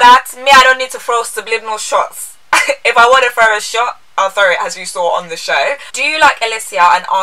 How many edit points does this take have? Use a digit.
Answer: 1